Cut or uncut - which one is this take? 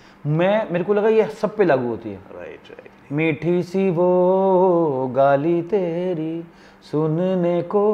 uncut